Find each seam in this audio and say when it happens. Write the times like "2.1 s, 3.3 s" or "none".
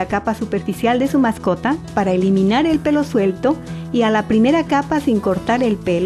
3.7 s